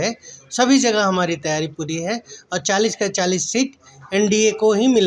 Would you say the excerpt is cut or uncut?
uncut